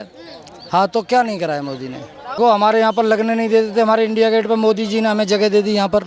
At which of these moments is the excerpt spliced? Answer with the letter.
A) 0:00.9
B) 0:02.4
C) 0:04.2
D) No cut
B